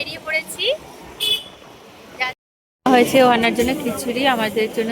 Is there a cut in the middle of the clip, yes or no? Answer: yes